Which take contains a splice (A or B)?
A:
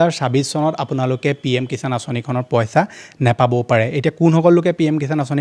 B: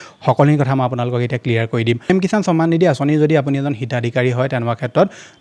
B